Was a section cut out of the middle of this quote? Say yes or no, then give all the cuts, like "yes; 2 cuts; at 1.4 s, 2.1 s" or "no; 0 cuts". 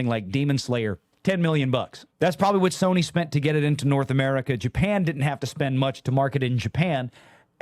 yes; 1 cut; at 2.0 s